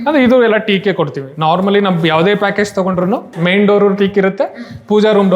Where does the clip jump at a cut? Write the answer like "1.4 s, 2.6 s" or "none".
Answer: 3.4 s